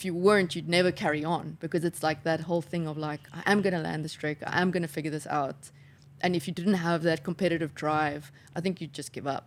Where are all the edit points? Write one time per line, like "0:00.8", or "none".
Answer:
none